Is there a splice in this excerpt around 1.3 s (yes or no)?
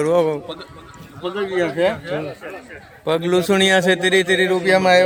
no